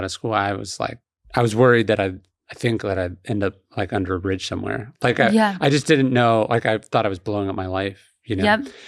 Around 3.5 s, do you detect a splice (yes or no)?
no